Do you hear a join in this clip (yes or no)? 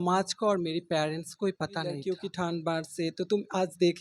yes